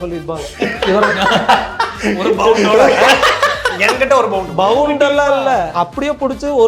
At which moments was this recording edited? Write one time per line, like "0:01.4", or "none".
0:05.7